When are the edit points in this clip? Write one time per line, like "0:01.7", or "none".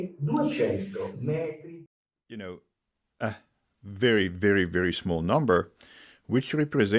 0:01.6